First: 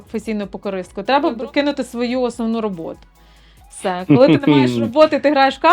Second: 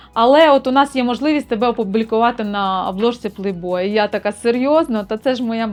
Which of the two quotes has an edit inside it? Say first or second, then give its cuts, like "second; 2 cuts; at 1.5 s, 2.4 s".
first; 1 cut; at 1.4 s